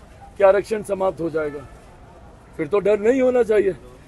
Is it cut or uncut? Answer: uncut